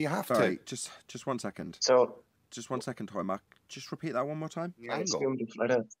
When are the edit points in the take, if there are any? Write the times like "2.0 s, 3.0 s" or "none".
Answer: 4.9 s